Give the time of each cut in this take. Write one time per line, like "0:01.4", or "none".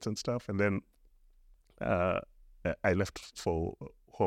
none